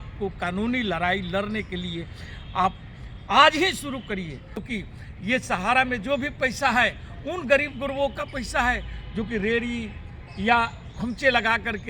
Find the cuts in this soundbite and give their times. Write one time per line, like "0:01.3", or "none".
0:04.6